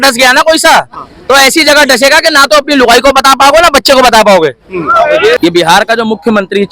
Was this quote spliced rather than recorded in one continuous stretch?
yes; 1 cut; at 5.4 s

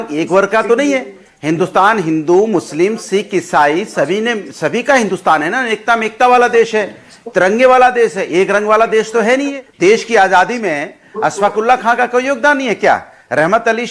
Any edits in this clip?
no; 0 cuts

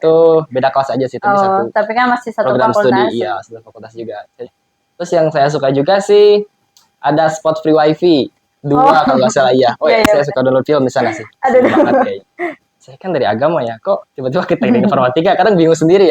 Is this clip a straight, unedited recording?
no; 2 cuts; at 4.5 s, 12.6 s

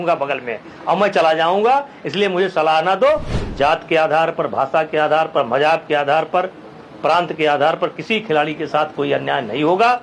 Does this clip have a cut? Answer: yes; 1 cut; at 3.4 s

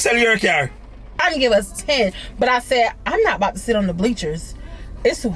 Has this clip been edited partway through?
yes; 1 cut; at 1.2 s

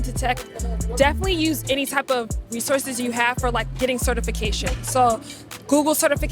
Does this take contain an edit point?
no; 0 cuts

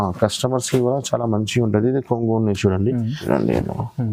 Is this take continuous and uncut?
no; 1 cut; at 3.2 s

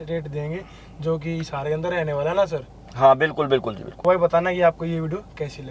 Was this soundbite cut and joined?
no; 0 cuts

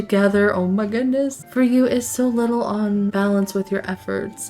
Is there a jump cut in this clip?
yes; 2 cuts; at 1.4 s, 3.1 s

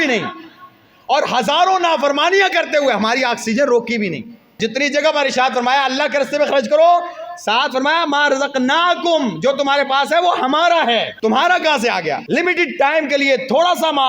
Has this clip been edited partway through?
yes; 3 cuts; at 4.6 s, 11.1 s, 12.2 s

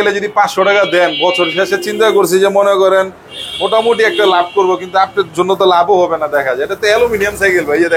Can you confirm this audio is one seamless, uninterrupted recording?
yes; 0 cuts

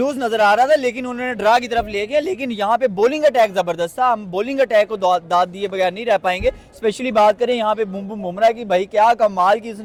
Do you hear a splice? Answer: no; 0 cuts

